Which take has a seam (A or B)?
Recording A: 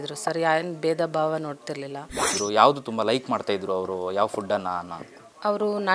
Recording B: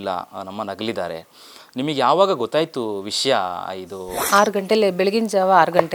A